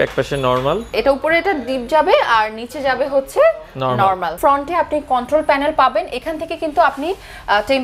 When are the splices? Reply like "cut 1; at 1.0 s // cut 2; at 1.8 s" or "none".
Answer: cut 1; at 0.9 s // cut 2; at 4.4 s